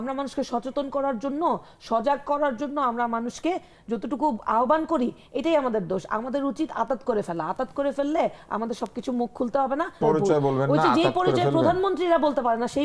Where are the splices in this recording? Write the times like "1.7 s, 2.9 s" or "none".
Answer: 10.0 s